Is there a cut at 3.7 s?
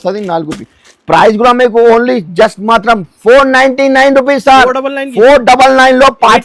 no; 0 cuts

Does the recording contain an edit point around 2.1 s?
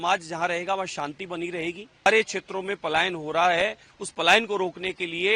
yes; 1 cut; at 2.1 s

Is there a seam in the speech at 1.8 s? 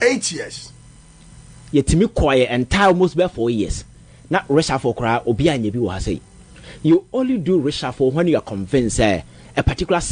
yes; 1 cut; at 1.8 s

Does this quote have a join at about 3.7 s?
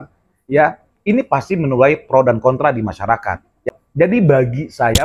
yes; 1 cut; at 3.7 s

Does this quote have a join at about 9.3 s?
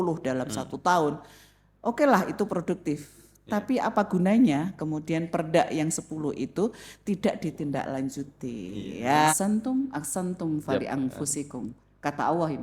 yes; 1 cut; at 9.3 s

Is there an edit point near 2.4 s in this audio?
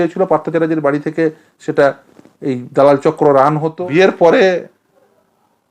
no; 1 cut; at 3.7 s

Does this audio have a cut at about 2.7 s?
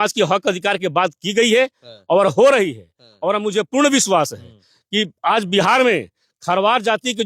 no; 0 cuts

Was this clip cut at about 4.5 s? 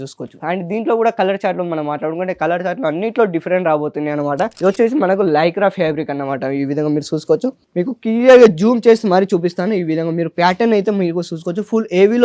yes; 1 cut; at 4.5 s

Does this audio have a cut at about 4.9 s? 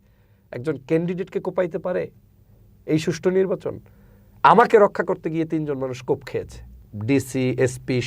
no; 1 cut; at 6.8 s

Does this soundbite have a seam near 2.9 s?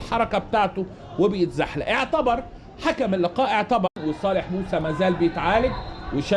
yes; 1 cut; at 2.9 s

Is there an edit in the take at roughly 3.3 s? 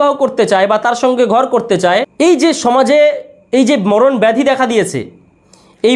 no; 1 cut; at 2.1 s

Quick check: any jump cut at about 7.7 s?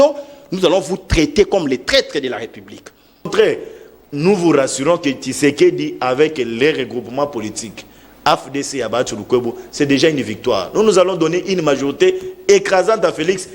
no; 1 cut; at 3.3 s

